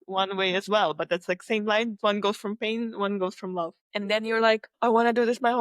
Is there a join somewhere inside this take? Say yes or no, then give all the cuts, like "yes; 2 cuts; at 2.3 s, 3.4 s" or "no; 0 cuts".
yes; 3 cuts; at 2.0 s, 3.8 s, 4.7 s